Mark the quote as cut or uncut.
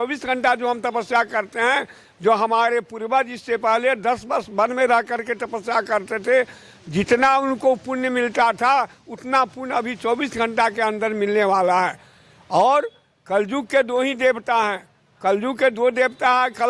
uncut